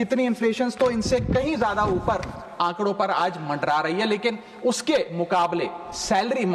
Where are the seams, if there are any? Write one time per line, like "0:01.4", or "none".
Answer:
none